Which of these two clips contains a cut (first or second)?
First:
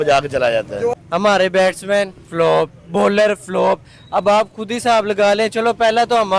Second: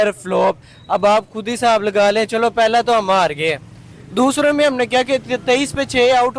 first